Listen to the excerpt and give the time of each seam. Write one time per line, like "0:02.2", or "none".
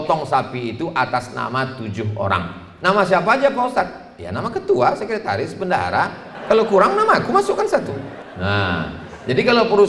0:06.3
0:08.2